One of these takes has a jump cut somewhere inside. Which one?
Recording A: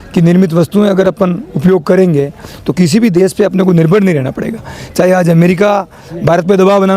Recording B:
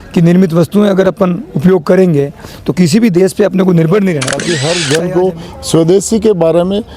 B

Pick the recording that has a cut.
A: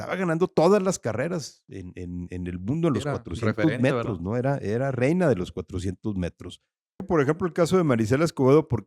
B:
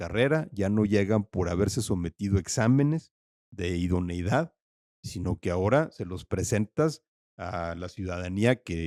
A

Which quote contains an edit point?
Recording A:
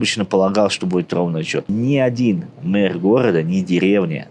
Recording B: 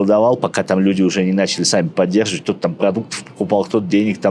A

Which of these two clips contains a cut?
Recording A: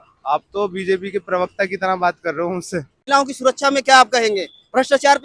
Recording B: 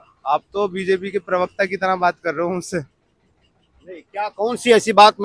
A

